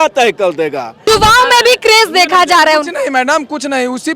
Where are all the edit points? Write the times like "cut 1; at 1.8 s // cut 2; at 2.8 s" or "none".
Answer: cut 1; at 1.0 s